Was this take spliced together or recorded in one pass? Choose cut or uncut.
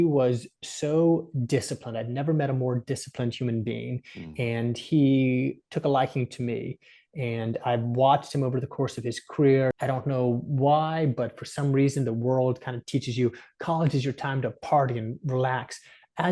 cut